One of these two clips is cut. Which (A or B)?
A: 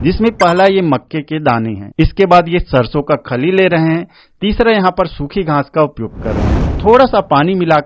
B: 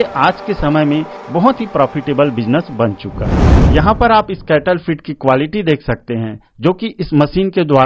A